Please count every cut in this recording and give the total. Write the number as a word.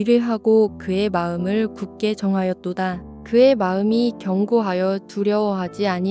one